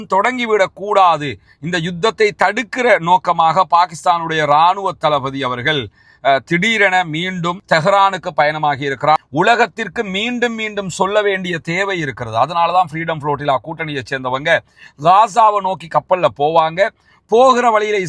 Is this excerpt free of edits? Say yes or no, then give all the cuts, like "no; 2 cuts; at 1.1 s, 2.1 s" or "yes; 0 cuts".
no; 1 cut; at 9.3 s